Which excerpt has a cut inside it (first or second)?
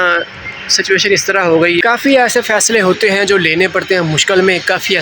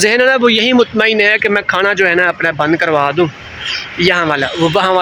first